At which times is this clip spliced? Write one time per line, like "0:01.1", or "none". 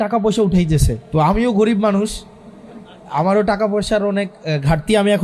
0:01.0